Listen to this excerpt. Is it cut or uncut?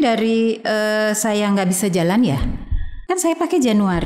cut